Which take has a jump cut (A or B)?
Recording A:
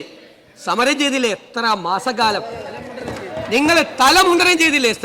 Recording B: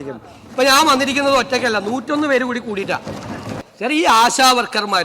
B